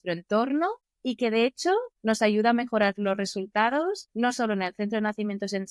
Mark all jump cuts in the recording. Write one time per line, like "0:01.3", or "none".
0:00.9
0:01.9
0:04.1